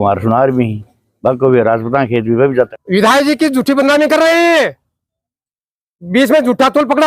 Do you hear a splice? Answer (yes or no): yes